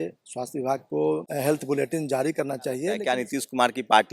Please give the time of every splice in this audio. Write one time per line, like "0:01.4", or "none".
0:01.3
0:03.0